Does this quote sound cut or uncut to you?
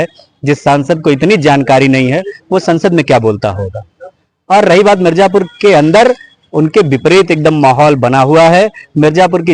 uncut